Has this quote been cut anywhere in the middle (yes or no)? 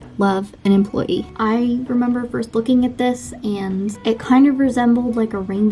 yes